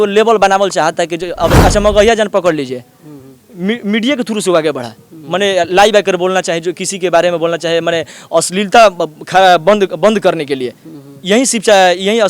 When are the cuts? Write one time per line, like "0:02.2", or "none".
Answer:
0:01.6